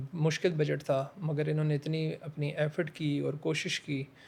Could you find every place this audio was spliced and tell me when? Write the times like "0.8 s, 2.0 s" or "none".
none